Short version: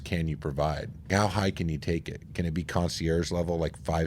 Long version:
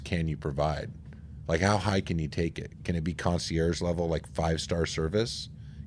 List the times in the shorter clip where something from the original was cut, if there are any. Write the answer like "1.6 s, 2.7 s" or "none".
1.1 s